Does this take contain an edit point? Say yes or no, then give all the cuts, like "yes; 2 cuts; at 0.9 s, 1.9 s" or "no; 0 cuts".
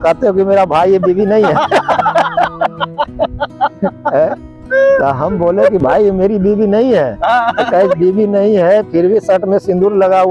no; 0 cuts